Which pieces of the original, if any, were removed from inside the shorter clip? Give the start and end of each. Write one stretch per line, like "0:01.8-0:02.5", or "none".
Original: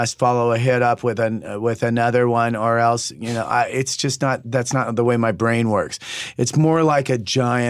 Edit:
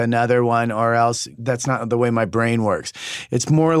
0:03.2-0:04.4